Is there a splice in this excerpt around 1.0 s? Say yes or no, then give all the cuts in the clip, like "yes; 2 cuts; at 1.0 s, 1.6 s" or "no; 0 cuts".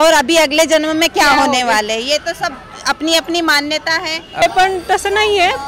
no; 1 cut; at 4.4 s